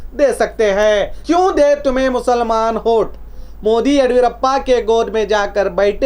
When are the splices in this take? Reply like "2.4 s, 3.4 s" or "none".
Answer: 1.1 s